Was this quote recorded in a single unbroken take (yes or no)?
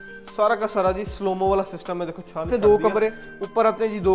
no